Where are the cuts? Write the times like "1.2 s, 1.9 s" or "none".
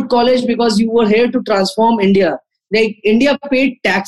none